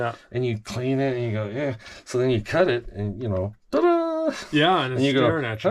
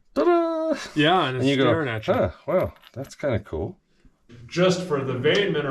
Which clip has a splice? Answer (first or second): second